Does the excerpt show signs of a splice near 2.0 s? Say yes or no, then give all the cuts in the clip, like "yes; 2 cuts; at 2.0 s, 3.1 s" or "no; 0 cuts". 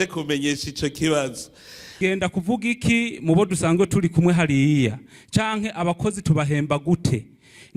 yes; 1 cut; at 2.0 s